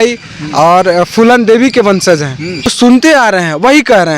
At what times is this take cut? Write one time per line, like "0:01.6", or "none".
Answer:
0:02.7